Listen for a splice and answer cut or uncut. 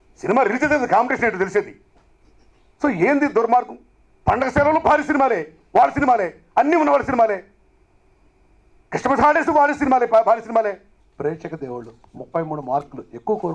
cut